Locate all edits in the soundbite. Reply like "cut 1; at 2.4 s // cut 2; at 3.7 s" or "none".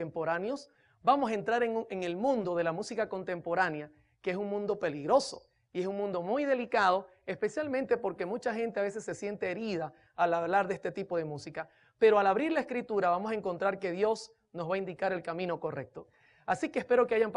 none